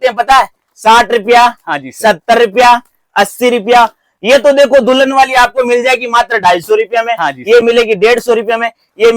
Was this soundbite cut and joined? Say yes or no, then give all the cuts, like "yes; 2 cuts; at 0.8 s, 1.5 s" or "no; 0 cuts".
no; 0 cuts